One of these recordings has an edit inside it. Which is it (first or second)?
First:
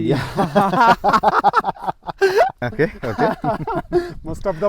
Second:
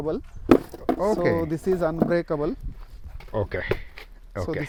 first